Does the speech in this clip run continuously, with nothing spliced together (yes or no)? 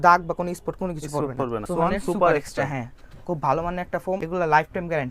no